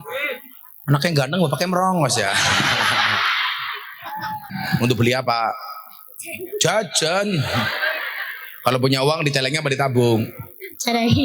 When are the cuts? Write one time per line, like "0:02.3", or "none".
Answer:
0:04.6